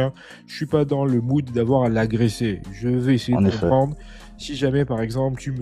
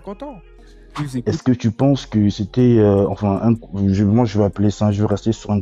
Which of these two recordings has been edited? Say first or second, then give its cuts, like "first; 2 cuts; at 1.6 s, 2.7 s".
second; 1 cut; at 1.2 s